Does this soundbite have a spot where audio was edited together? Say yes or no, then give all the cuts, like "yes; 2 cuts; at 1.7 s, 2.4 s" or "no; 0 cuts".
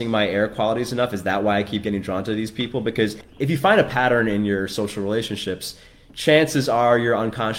yes; 1 cut; at 3.2 s